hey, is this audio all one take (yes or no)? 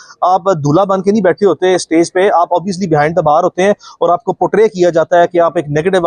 yes